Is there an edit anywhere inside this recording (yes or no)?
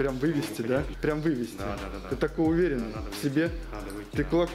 yes